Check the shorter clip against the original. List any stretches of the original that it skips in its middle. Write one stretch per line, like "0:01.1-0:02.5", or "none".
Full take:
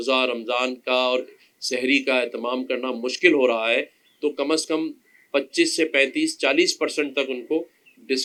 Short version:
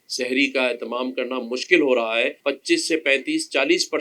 0:03.9-0:05.2